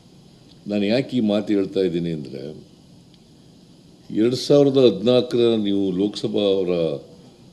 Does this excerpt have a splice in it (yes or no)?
no